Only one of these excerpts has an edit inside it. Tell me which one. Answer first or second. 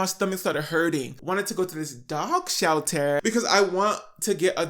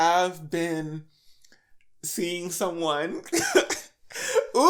first